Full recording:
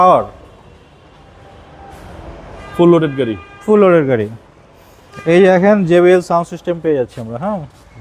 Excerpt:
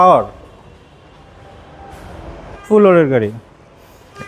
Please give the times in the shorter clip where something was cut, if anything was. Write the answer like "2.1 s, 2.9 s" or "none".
2.5 s